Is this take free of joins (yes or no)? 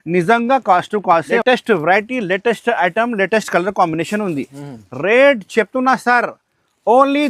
no